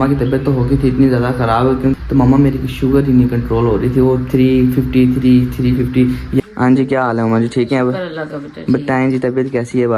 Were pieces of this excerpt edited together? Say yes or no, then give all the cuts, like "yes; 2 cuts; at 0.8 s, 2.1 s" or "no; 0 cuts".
yes; 2 cuts; at 1.9 s, 6.4 s